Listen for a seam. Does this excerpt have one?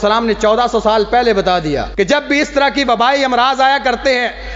yes; 1 cut; at 1.9 s

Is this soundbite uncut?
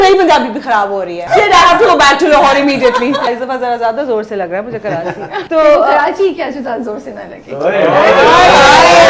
no; 3 cuts; at 1.2 s, 3.3 s, 5.3 s

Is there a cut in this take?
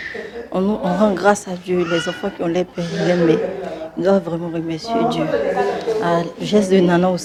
no; 0 cuts

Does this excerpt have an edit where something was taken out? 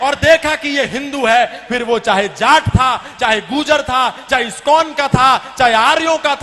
no; 0 cuts

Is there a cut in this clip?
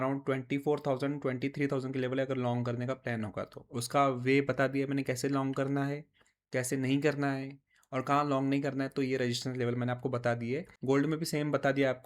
yes; 1 cut; at 10.7 s

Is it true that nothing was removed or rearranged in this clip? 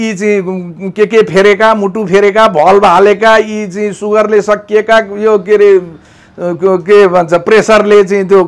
yes; 0 cuts

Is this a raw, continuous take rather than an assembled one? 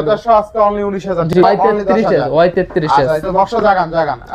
no; 1 cut; at 1.3 s

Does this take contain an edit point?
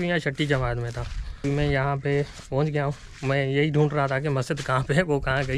yes; 1 cut; at 1.4 s

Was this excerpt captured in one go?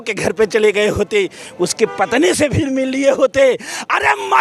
yes; 0 cuts

